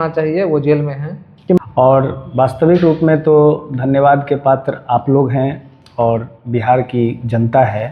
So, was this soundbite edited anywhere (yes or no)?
yes